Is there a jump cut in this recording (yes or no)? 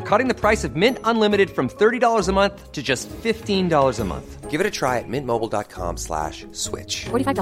no